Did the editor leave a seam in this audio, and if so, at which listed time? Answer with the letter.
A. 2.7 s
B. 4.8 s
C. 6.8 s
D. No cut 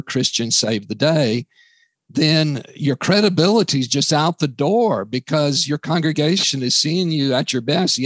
D